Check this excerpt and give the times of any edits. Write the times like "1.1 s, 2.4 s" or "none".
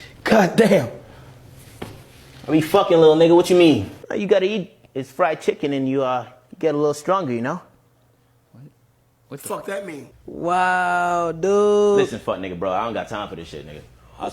4.0 s, 10.1 s